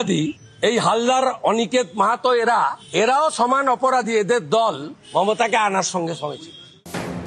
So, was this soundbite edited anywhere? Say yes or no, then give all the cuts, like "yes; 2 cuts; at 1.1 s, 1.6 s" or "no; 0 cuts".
no; 0 cuts